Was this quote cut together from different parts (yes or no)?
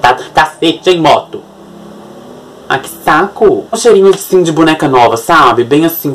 yes